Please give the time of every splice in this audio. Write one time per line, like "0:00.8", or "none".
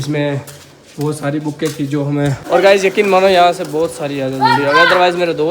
0:02.4